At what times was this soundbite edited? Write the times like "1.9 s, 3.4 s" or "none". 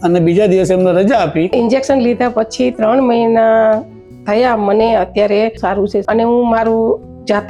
1.5 s